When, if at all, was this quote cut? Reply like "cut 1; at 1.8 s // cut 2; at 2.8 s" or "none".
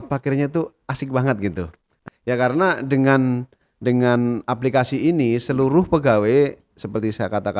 cut 1; at 2.0 s